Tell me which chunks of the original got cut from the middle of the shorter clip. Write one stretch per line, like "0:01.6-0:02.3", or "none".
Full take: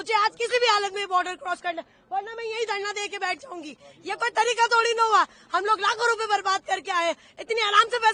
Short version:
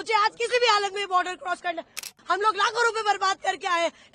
0:02.1-0:05.3

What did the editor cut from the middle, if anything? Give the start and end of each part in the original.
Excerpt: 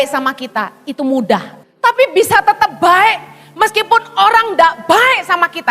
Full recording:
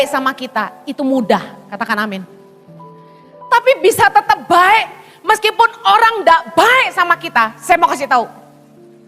0:01.6-0:03.3

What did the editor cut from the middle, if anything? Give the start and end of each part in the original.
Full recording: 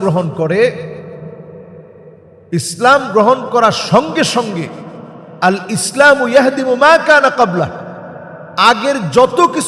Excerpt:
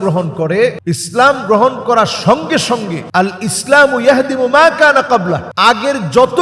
0:00.8-0:02.4
0:04.6-0:05.2
0:07.8-0:08.5

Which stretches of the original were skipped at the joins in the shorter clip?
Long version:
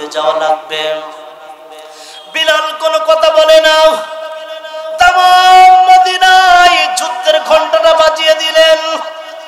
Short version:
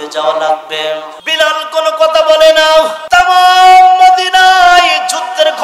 0:01.2-0:02.2
0:04.1-0:04.9

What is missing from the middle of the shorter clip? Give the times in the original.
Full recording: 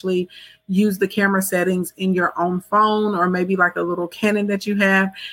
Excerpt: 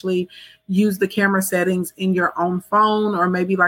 none

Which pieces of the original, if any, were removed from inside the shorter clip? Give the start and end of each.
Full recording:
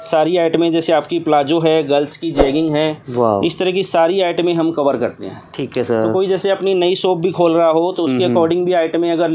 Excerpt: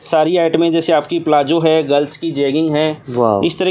none

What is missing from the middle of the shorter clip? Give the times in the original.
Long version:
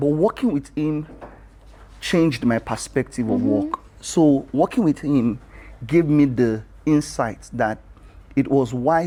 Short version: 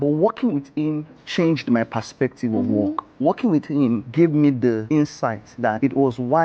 0:01.2-0:01.9
0:03.9-0:04.5
0:05.4-0:05.8
0:06.9-0:07.7

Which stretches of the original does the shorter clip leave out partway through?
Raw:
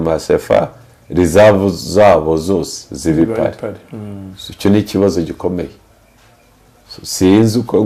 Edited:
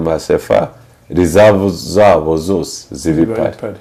none

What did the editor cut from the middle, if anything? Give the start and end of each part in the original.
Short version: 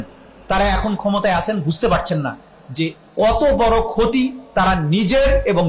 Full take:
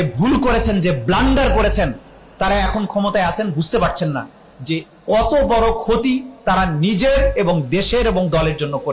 none

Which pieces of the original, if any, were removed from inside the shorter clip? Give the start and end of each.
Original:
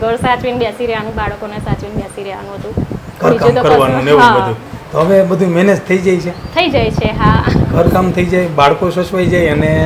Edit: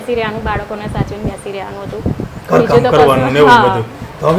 none

